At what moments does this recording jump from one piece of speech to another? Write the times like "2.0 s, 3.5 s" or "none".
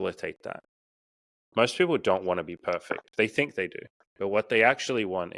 0.7 s, 4.1 s